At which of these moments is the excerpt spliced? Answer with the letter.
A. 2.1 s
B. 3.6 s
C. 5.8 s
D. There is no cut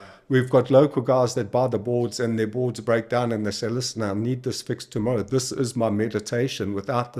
D